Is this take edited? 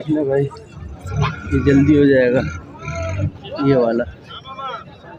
no; 0 cuts

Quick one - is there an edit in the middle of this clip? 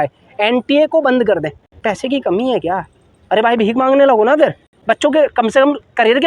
yes; 2 cuts; at 1.7 s, 4.7 s

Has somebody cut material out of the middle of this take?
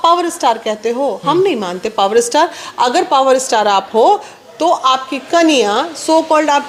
no; 0 cuts

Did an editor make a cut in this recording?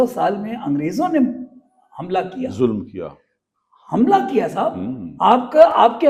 no; 0 cuts

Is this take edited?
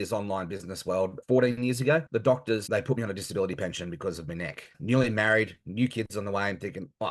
yes; 3 cuts; at 1.2 s, 2.3 s, 4.8 s

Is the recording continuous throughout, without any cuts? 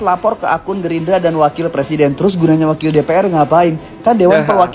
yes; 0 cuts

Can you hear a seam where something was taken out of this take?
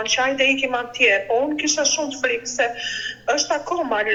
no; 0 cuts

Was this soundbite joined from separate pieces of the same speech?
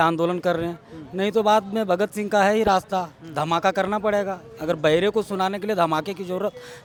no; 0 cuts

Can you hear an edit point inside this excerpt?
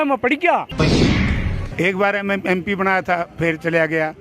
yes; 1 cut; at 1.1 s

